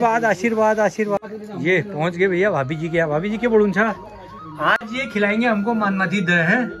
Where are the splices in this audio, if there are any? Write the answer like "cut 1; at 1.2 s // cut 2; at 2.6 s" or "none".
cut 1; at 1.2 s